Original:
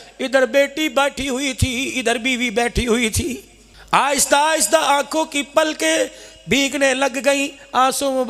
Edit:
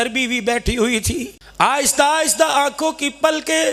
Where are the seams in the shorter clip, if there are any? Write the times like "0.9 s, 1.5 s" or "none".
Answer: 1.4 s

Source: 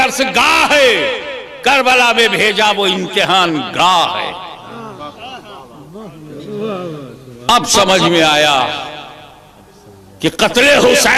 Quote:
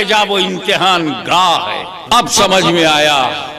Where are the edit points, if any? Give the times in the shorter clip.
1.9 s

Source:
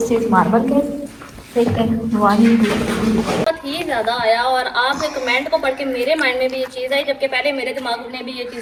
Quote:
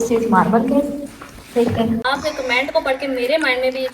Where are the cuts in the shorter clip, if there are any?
2.0 s

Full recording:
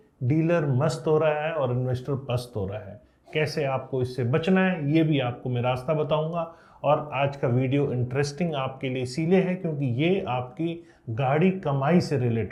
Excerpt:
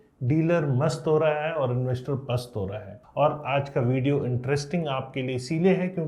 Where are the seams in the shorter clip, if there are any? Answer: 3.0 s

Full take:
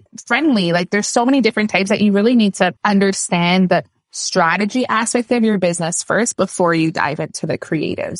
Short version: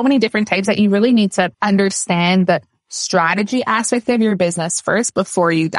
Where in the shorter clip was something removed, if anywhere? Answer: none

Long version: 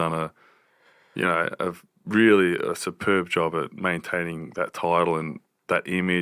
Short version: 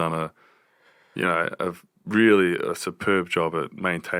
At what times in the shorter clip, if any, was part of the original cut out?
none

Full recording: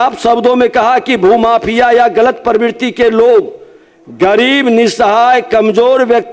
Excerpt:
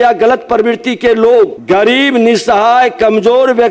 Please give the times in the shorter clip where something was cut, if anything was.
1.6 s

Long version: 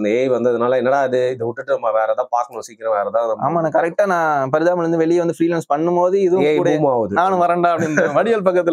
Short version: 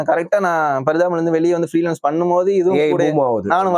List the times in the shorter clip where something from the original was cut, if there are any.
none

